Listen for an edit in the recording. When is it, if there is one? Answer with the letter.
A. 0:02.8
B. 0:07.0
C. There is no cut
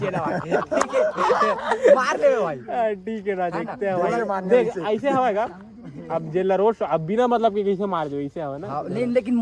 C